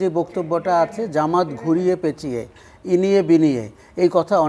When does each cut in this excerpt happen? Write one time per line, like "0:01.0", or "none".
none